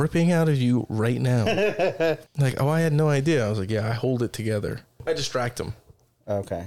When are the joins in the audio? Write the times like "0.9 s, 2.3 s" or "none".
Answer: 2.3 s, 4.9 s

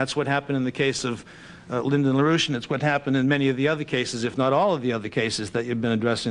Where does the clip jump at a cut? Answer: 1.6 s

